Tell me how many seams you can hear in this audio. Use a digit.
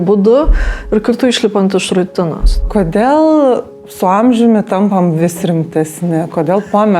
1